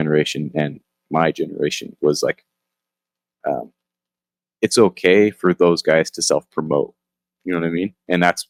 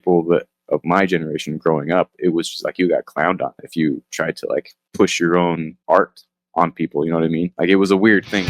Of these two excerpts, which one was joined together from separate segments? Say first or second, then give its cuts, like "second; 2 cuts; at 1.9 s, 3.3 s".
second; 2 cuts; at 4.8 s, 5.7 s